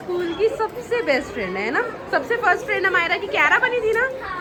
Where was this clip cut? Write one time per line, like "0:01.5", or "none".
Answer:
none